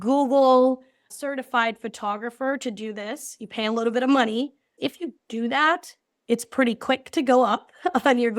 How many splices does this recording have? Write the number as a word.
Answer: two